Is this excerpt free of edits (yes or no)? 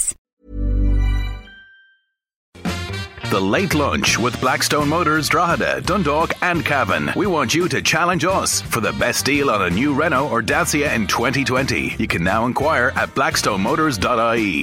no